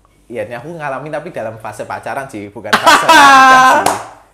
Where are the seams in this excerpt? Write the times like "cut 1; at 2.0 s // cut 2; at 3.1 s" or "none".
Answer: none